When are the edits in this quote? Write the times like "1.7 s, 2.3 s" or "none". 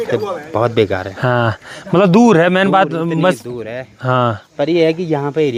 none